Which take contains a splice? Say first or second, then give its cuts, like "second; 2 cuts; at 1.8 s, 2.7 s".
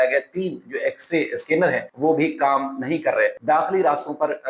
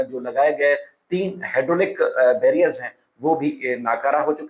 first; 2 cuts; at 1.9 s, 3.4 s